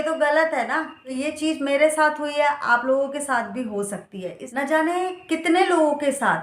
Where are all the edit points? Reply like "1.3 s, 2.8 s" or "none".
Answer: 1.0 s, 4.4 s